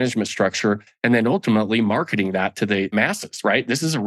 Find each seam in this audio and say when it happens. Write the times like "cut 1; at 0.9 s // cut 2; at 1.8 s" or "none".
cut 1; at 2.9 s